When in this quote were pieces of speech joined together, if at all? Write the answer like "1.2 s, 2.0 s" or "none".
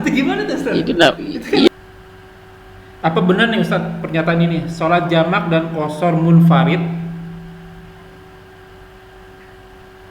1.7 s